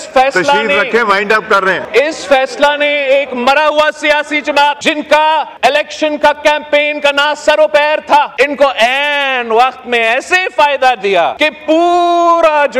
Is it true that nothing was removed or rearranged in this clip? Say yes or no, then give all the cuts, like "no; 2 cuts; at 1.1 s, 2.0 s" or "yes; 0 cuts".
no; 5 cuts; at 1.8 s, 4.8 s, 5.5 s, 8.3 s, 11.3 s